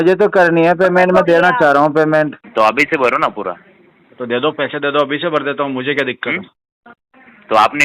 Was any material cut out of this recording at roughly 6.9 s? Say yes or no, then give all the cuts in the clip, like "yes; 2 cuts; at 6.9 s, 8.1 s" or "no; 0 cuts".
no; 1 cut; at 2.4 s